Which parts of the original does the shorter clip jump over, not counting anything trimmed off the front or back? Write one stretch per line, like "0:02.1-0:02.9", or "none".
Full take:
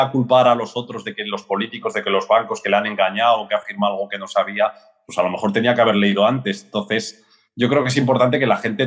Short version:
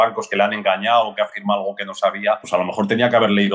0:04.8-0:05.1